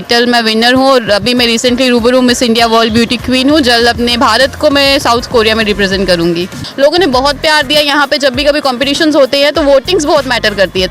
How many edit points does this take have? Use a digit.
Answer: 1